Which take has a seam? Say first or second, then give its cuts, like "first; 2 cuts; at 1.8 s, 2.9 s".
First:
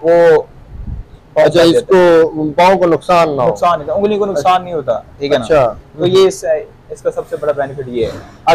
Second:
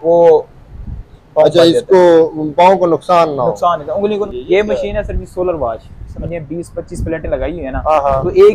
second; 2 cuts; at 4.3 s, 5.9 s